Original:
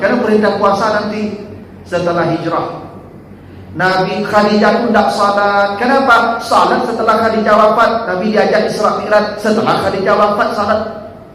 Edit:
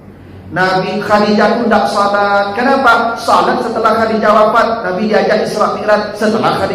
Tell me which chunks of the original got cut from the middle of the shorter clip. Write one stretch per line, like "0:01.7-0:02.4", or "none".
none